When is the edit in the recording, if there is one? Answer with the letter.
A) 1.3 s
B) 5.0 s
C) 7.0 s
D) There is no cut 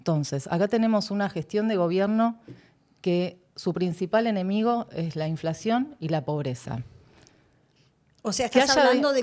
D